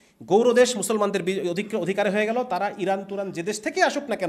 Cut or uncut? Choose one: uncut